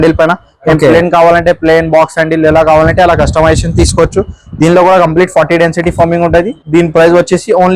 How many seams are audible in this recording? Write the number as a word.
one